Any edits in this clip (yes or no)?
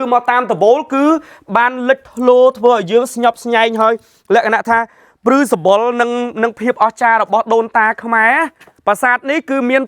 yes